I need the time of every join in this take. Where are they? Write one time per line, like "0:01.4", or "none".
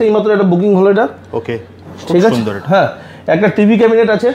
none